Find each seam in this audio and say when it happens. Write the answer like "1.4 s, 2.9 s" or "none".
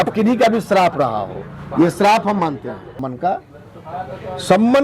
3.0 s